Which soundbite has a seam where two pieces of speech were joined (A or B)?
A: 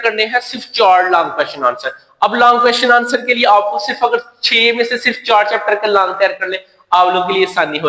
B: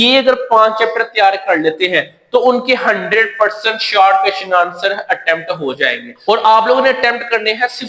B